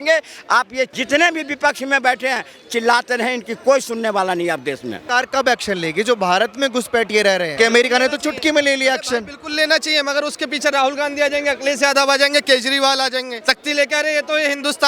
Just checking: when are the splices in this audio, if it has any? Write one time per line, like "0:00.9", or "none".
0:05.0
0:07.5
0:13.3